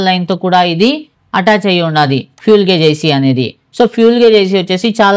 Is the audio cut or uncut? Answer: uncut